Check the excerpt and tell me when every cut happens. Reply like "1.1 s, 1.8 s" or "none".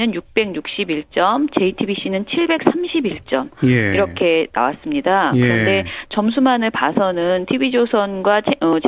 7.7 s